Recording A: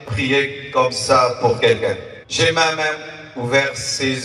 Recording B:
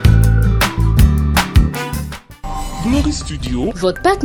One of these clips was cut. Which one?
A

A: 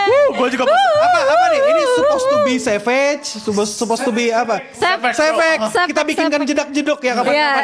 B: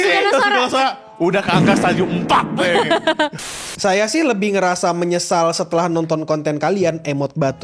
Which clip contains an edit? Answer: B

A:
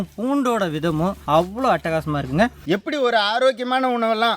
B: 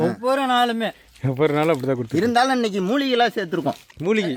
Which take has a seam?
A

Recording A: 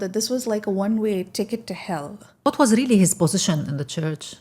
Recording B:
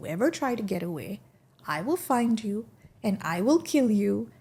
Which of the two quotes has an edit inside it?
A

